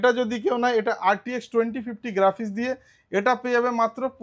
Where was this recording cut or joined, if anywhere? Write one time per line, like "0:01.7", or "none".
none